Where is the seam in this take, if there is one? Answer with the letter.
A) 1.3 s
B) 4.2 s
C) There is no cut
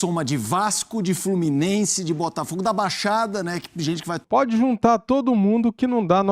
B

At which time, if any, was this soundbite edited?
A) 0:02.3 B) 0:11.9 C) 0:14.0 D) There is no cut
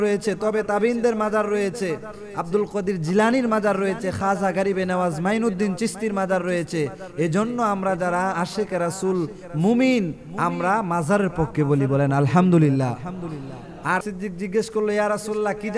C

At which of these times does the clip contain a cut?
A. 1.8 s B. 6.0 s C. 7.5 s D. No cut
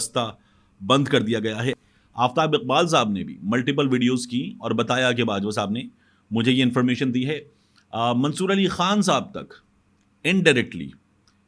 A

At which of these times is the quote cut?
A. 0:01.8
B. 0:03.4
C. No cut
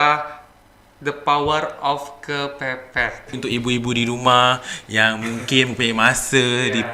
B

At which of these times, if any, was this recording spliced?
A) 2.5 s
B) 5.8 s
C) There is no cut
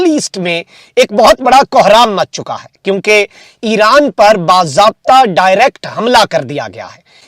C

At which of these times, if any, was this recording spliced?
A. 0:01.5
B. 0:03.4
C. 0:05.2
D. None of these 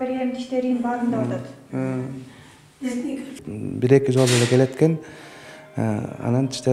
B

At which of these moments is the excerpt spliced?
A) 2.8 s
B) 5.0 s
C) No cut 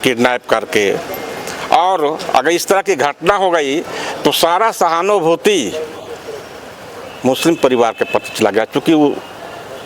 C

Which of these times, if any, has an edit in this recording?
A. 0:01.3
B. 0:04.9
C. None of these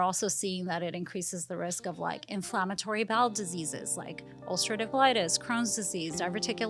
B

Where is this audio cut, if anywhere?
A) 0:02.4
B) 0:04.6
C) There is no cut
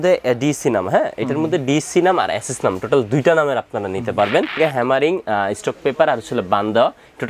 B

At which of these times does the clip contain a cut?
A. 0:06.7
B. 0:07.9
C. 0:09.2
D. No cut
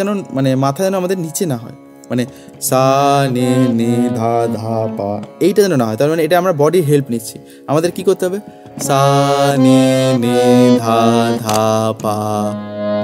D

